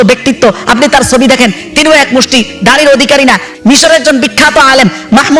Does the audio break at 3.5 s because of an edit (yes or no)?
yes